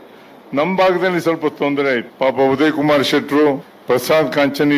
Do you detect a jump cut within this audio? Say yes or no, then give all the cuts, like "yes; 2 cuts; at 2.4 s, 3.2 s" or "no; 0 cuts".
yes; 2 cuts; at 2.1 s, 3.7 s